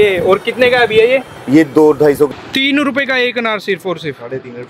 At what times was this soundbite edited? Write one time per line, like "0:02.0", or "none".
0:02.3